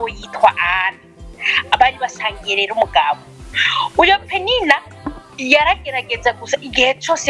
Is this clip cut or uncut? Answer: uncut